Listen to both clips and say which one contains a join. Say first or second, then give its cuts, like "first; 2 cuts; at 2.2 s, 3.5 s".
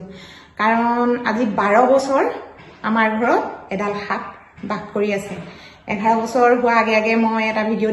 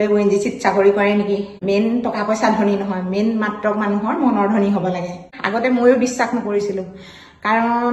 second; 2 cuts; at 1.5 s, 5.3 s